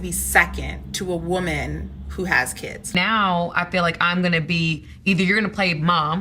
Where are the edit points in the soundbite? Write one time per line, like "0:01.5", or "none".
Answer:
0:03.0